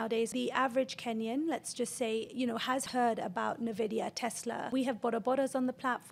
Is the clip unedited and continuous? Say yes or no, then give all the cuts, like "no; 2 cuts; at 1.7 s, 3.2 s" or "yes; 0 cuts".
yes; 0 cuts